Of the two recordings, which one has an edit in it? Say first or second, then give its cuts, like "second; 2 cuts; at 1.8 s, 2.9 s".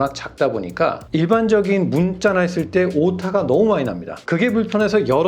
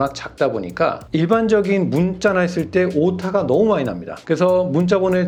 first; 1 cut; at 4.1 s